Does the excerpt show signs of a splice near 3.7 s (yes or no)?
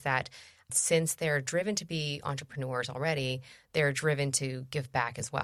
no